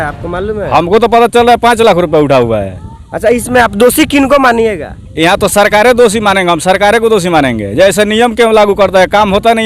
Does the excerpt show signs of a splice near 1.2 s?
no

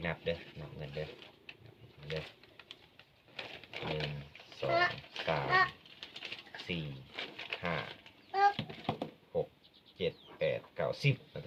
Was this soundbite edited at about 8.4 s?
no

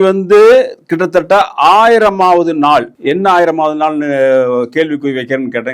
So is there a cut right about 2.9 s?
yes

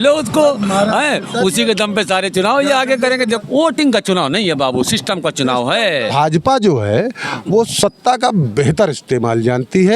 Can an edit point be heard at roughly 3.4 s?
yes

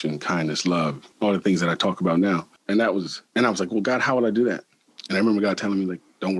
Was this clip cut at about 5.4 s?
no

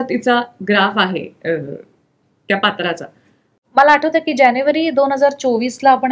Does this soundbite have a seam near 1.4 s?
no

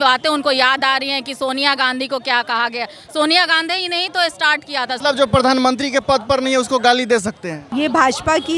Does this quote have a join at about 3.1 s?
no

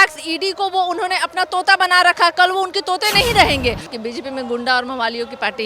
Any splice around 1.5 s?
no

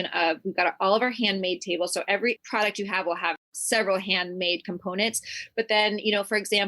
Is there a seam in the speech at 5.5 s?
no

